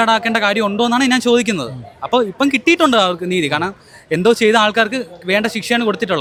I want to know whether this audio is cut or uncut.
uncut